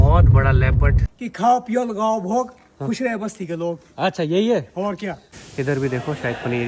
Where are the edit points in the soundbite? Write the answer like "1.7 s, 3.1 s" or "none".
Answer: 1.1 s, 5.2 s